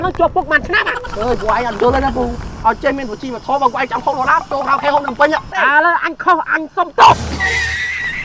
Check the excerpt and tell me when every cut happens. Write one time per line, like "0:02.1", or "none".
0:01.0
0:05.6